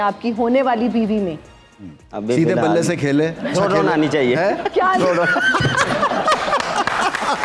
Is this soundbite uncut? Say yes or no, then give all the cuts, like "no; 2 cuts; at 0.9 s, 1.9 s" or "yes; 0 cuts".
no; 1 cut; at 3.5 s